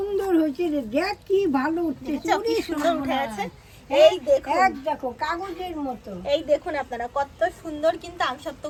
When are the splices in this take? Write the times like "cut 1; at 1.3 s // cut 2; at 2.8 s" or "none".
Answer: none

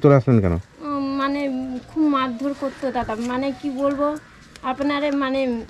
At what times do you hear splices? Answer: none

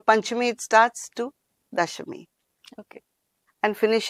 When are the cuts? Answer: none

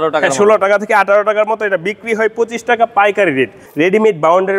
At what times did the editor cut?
cut 1; at 3.6 s

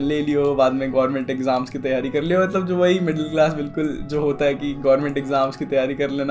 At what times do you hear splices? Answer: none

